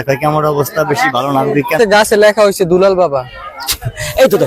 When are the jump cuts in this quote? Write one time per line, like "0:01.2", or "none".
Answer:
0:01.8